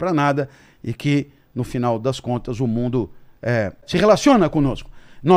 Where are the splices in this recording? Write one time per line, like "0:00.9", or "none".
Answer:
0:03.8